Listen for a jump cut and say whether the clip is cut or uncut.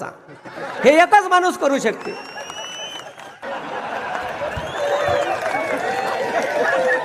cut